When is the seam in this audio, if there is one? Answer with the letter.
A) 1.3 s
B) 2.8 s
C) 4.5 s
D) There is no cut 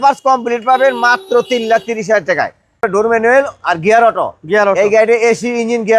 B